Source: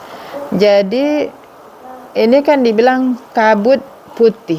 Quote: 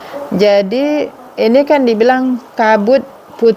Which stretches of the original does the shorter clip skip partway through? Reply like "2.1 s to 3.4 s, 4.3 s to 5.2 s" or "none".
1.4 s to 2.0 s